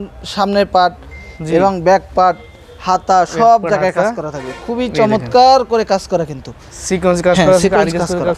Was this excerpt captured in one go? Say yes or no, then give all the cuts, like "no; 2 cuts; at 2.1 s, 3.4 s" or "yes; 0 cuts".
yes; 0 cuts